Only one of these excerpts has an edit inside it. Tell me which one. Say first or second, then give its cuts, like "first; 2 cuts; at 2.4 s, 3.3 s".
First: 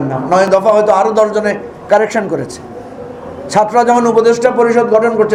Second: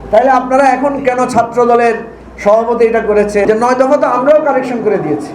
second; 1 cut; at 3.5 s